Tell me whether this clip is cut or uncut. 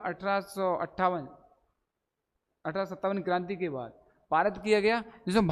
uncut